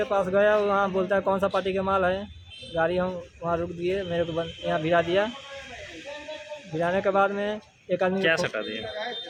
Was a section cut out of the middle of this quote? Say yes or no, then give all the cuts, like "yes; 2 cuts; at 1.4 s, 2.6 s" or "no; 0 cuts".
no; 0 cuts